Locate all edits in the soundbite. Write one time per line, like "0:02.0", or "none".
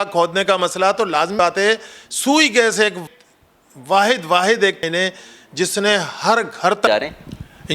0:01.3
0:03.0
0:04.8

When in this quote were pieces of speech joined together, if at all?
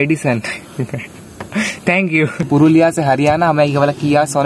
0:02.5

